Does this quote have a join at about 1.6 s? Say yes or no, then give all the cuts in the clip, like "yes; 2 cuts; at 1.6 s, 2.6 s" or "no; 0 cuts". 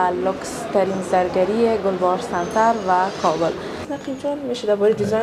no; 1 cut; at 3.9 s